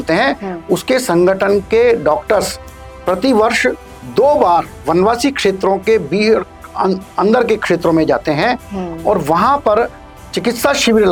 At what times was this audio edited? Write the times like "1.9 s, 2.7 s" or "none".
none